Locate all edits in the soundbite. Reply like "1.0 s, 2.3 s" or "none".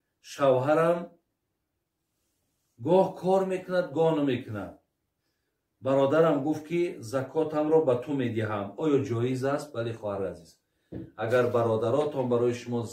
none